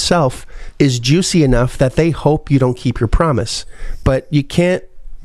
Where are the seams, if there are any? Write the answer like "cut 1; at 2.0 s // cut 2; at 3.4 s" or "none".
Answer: none